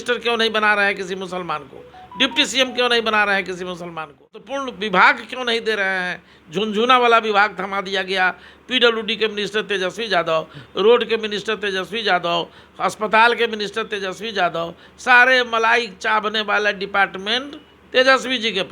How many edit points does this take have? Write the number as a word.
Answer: one